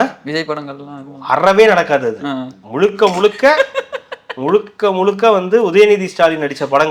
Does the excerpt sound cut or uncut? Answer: uncut